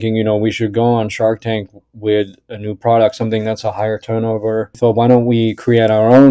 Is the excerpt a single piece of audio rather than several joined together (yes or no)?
no